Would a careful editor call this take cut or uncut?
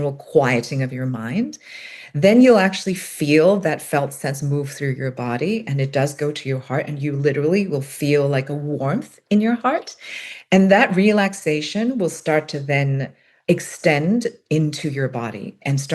cut